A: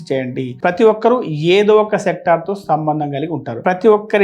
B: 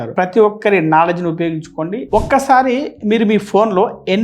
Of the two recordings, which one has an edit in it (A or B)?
B